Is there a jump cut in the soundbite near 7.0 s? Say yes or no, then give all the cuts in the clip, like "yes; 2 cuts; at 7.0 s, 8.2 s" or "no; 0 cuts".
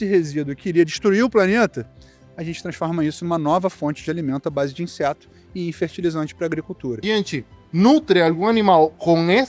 yes; 1 cut; at 7.0 s